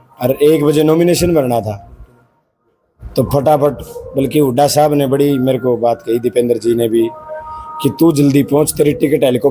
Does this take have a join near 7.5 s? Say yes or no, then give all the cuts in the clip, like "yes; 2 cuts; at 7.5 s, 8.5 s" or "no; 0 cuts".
no; 0 cuts